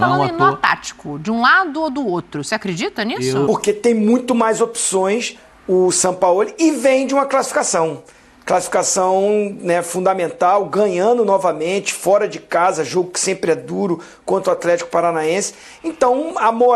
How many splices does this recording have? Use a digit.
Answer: 1